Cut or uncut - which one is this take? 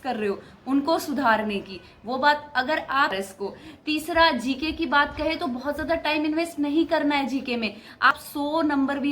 cut